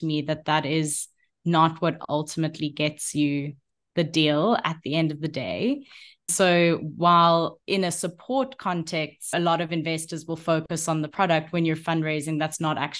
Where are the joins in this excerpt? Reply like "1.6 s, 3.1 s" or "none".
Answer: 6.3 s, 7.6 s, 9.3 s

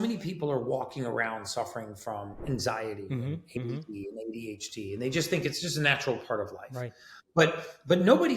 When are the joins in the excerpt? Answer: none

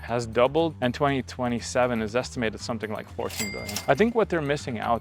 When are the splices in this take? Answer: 0.8 s, 3.6 s

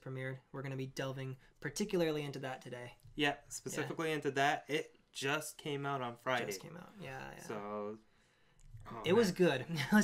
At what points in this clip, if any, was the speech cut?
1.0 s

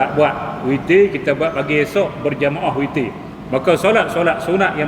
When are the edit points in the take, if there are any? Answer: 3.3 s

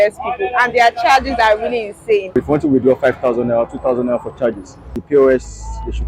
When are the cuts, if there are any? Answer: 2.4 s, 5.0 s

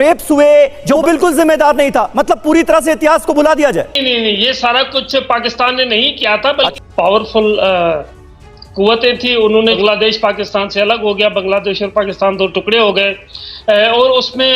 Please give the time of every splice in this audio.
1.0 s, 4.0 s, 6.8 s, 9.8 s

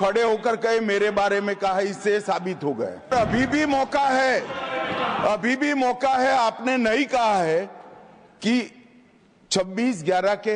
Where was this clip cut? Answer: 3.1 s

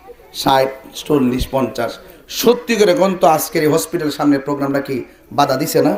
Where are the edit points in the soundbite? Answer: none

